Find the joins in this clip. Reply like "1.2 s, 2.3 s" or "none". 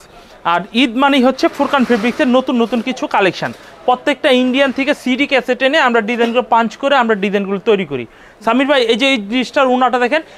none